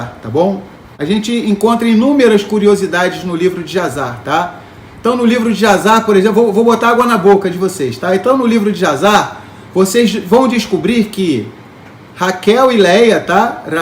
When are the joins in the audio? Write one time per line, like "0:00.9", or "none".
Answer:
0:01.0

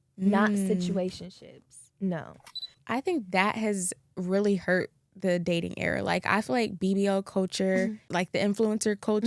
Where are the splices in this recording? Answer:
0:02.7
0:08.1

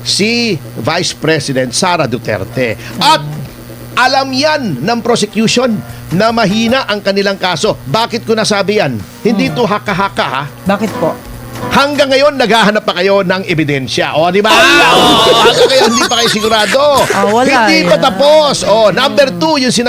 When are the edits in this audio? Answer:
0:11.4

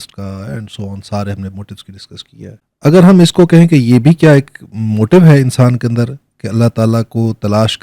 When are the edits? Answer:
0:02.6

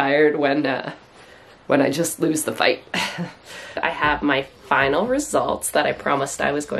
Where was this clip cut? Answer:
0:03.8

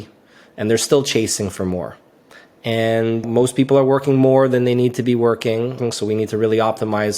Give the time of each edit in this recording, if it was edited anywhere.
0:03.3
0:05.8

